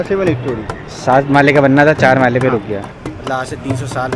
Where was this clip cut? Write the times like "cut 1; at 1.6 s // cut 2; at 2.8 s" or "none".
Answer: cut 1; at 2.9 s